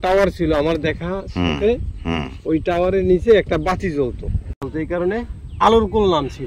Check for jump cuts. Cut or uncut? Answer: cut